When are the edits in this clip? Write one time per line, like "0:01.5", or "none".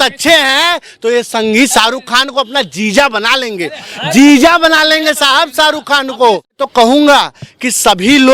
0:06.6